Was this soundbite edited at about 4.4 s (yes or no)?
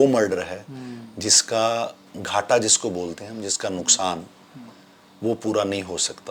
no